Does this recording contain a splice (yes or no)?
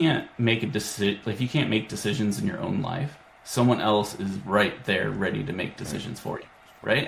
no